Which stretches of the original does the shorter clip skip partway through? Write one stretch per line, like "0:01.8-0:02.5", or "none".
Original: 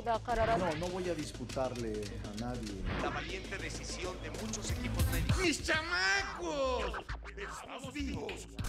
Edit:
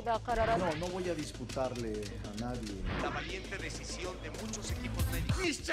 none